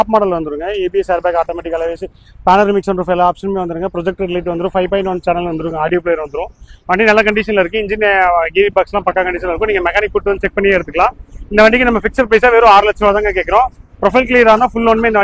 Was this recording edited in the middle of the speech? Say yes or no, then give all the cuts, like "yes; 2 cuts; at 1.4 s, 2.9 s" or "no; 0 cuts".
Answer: no; 0 cuts